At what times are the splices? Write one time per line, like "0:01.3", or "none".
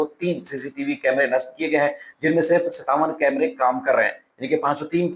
none